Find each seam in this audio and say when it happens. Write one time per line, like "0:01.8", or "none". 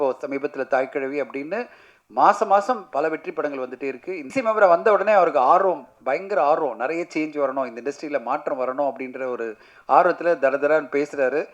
0:04.3